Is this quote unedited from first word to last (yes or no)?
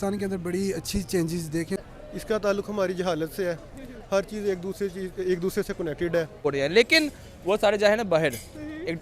no